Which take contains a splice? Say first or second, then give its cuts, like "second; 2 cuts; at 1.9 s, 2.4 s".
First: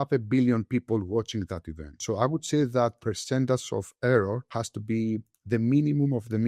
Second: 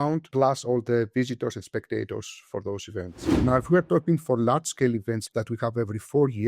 second; 2 cuts; at 3.2 s, 5.2 s